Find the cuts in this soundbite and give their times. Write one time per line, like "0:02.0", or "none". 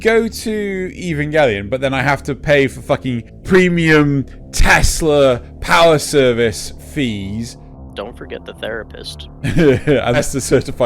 0:03.3
0:10.2